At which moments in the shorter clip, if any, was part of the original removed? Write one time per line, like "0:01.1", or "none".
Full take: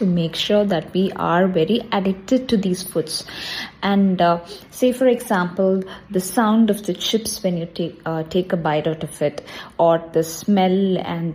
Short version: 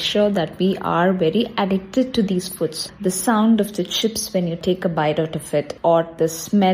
0:02.9
0:04.6
0:05.7